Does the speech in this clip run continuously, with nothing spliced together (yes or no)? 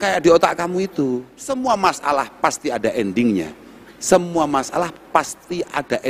no